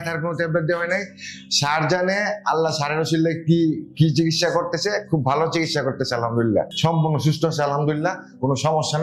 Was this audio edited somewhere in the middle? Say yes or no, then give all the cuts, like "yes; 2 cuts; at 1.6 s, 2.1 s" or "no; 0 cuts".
yes; 1 cut; at 6.7 s